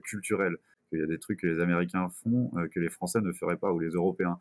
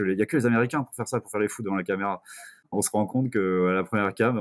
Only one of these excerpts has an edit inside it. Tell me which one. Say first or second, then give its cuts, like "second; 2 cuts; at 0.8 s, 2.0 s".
second; 1 cut; at 2.5 s